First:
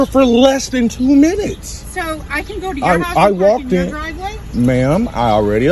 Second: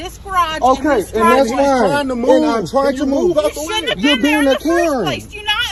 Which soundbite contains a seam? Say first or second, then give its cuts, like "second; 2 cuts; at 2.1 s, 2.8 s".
first; 1 cut; at 3.1 s